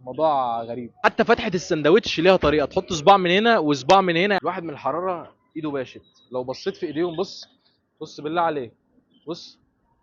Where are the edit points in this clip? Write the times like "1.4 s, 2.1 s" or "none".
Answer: 0.9 s, 4.4 s